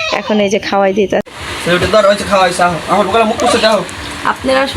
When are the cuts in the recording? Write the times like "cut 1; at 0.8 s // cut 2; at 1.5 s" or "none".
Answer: cut 1; at 1.3 s